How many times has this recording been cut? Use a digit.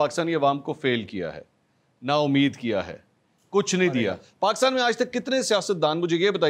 1